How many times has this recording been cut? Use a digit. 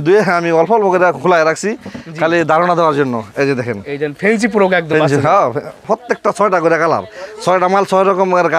1